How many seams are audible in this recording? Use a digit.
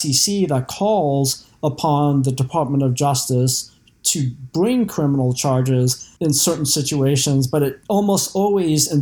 2